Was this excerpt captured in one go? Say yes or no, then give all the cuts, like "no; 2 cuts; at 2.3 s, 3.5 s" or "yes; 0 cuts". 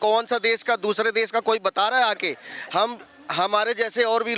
yes; 0 cuts